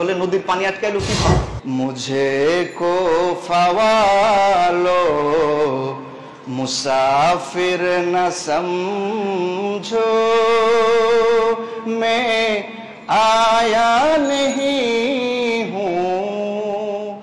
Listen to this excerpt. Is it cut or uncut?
cut